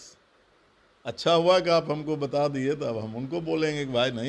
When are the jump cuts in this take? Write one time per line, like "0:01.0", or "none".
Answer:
none